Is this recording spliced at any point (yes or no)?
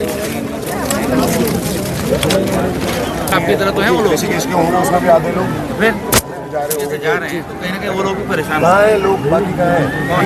no